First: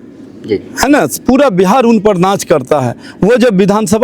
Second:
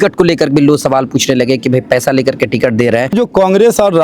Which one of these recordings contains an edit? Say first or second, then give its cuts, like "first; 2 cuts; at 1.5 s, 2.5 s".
second; 1 cut; at 3.2 s